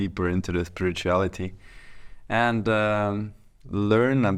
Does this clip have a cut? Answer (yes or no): no